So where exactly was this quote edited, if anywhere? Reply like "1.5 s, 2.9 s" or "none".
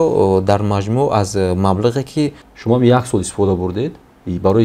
2.5 s